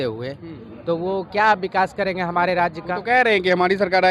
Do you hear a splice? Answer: no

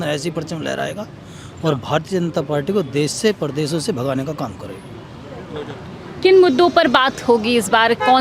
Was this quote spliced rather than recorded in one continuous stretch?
no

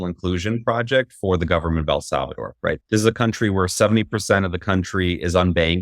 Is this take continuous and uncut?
yes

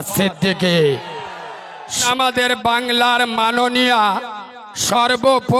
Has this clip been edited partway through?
yes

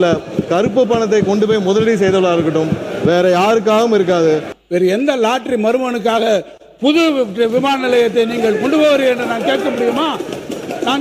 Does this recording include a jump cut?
yes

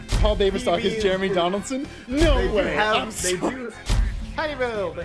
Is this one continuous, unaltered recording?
yes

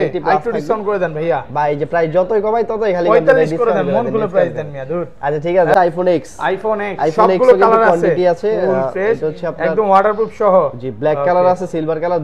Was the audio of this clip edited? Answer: yes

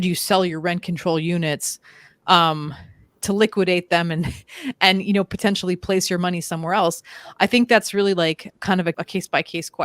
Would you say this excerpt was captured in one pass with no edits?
no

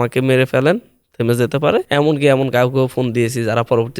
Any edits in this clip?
yes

